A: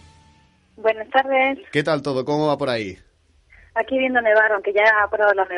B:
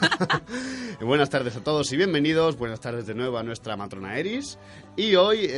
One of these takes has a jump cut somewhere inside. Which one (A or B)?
A